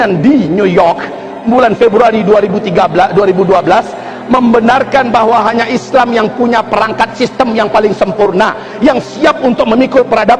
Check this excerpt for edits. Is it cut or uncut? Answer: uncut